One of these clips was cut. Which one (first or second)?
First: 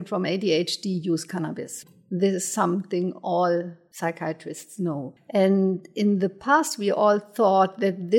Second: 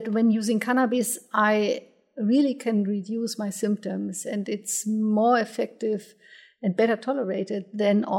first